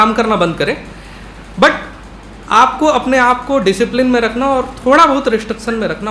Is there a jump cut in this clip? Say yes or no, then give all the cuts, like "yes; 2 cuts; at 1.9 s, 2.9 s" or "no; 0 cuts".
no; 0 cuts